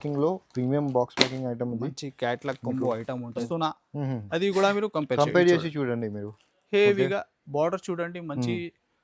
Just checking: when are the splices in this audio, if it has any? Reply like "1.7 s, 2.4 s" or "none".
3.5 s